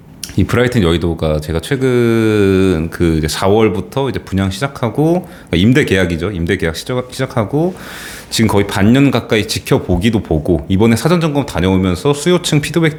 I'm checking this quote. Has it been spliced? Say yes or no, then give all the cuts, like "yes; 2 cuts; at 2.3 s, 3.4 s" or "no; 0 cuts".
no; 0 cuts